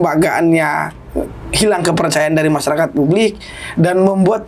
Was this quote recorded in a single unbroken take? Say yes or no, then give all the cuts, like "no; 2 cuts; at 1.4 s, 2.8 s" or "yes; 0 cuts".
yes; 0 cuts